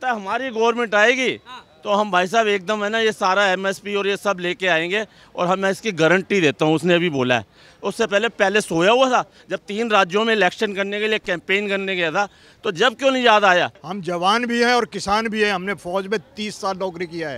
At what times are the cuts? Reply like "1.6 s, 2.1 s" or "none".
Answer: 13.8 s